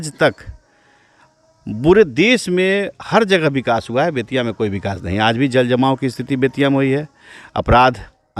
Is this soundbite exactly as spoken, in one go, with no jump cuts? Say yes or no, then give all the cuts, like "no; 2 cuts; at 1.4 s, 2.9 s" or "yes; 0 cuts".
yes; 0 cuts